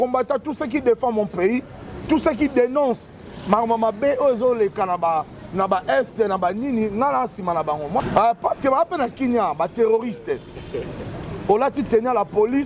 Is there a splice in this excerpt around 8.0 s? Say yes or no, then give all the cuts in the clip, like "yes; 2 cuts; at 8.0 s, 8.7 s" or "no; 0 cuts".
yes; 1 cut; at 8.0 s